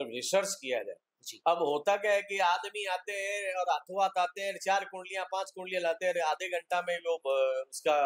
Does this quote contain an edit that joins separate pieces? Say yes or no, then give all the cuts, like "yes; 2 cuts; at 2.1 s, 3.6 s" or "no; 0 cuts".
no; 0 cuts